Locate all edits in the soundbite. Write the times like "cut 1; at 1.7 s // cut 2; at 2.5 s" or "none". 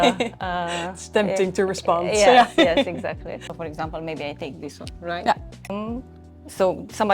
cut 1; at 3.6 s // cut 2; at 5.7 s

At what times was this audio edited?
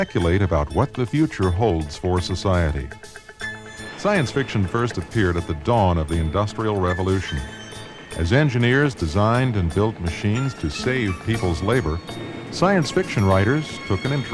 cut 1; at 6.9 s

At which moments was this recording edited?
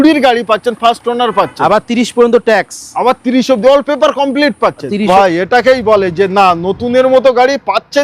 cut 1; at 5.1 s

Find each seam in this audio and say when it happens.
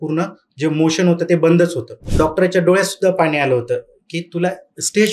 cut 1; at 2.0 s

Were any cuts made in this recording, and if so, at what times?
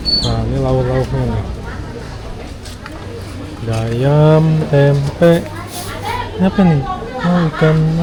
none

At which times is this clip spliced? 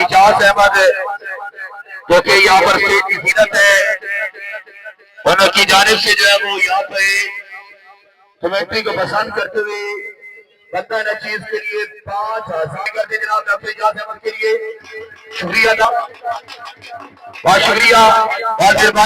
cut 1; at 12.8 s // cut 2; at 15.8 s

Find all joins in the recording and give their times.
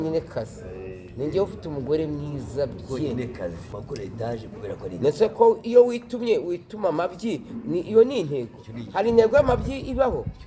cut 1; at 3.7 s

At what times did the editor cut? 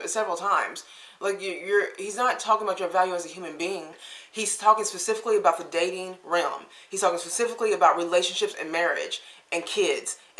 cut 1; at 4.0 s

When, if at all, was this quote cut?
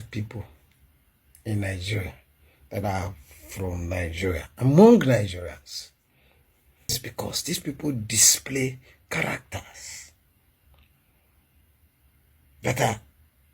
cut 1; at 6.9 s

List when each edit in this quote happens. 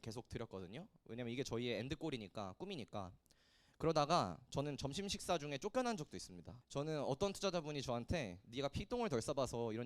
none

